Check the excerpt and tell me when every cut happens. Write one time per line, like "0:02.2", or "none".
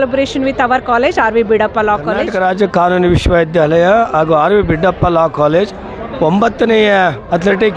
0:02.3